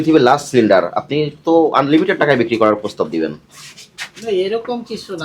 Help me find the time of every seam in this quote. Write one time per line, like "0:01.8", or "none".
none